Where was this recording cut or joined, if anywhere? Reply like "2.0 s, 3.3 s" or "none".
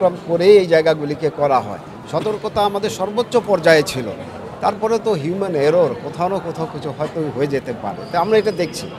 none